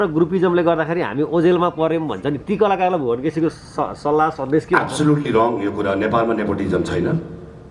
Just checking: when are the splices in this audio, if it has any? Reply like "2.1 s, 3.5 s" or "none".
none